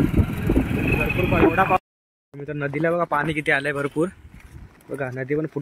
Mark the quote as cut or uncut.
cut